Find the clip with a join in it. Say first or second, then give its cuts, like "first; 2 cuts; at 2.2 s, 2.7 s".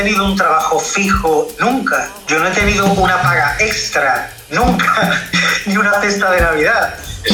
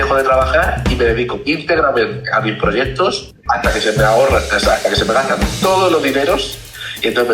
second; 1 cut; at 3.3 s